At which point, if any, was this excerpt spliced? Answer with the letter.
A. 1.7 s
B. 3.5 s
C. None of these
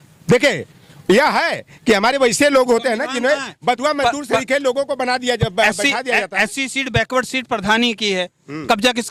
C